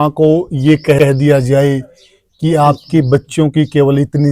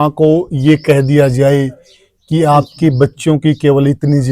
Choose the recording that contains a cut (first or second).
second